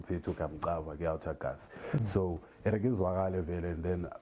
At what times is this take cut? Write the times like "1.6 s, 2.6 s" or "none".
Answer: none